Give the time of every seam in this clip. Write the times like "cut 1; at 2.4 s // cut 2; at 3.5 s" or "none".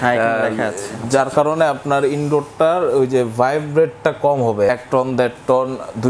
cut 1; at 4.7 s